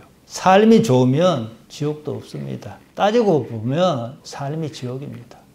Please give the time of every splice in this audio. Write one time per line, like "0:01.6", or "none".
0:04.2